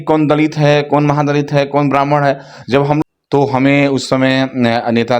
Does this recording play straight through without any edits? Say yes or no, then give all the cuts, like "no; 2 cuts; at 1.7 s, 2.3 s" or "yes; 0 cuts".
no; 1 cut; at 3.0 s